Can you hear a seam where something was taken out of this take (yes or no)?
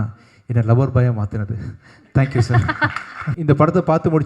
yes